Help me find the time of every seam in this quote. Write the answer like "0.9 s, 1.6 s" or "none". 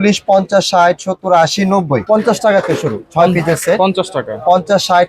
2.0 s